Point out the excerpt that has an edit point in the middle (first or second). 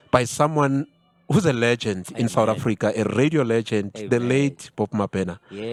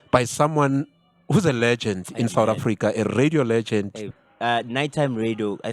second